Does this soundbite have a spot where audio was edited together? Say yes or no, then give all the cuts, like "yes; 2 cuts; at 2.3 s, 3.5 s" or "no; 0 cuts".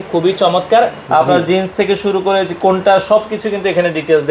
yes; 1 cut; at 1.0 s